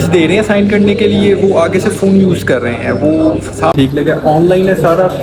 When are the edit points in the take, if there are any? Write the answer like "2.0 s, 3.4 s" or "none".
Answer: 3.7 s